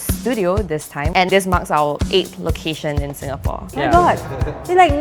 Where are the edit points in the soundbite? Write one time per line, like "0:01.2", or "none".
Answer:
0:01.0
0:03.6